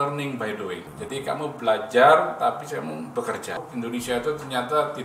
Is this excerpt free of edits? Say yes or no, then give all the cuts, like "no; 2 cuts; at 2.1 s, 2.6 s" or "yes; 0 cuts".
no; 2 cuts; at 0.9 s, 3.6 s